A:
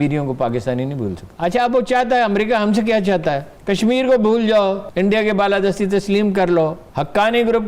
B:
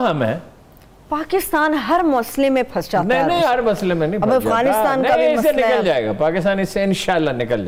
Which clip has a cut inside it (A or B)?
A